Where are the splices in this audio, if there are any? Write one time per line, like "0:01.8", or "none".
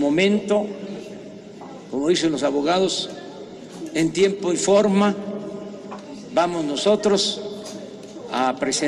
none